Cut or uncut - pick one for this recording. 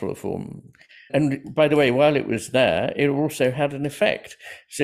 uncut